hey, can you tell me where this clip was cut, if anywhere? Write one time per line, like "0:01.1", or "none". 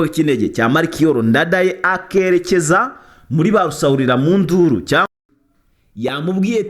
0:05.1

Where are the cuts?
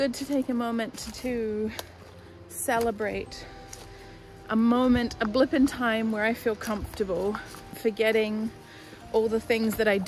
0:01.0
0:07.8

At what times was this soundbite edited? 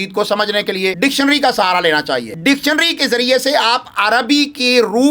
0:00.9
0:02.3

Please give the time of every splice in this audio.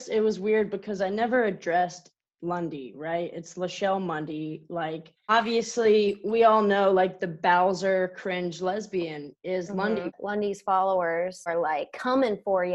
0:05.3
0:10.2
0:11.5

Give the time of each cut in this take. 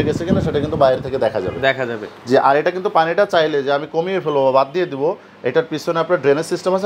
none

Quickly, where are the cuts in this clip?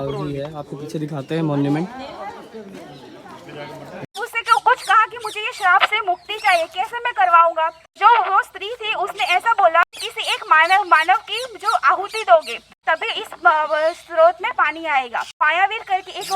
0:04.1
0:08.0
0:09.8
0:12.7
0:15.4

